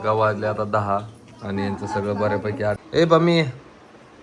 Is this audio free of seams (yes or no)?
no